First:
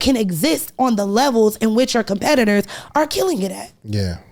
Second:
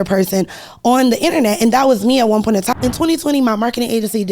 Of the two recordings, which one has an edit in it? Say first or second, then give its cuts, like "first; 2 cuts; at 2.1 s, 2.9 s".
second; 1 cut; at 2.7 s